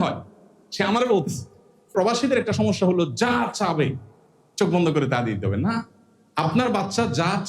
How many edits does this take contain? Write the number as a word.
one